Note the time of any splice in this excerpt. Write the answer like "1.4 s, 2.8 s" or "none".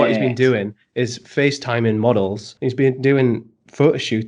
2.5 s

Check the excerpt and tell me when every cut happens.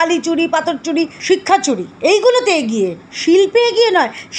1.2 s, 1.9 s

